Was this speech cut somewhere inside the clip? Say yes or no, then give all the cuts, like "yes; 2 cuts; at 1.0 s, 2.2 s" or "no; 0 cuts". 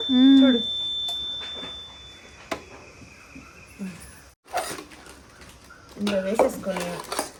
no; 0 cuts